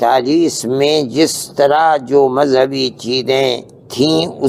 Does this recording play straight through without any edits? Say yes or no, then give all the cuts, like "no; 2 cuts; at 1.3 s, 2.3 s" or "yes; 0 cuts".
yes; 0 cuts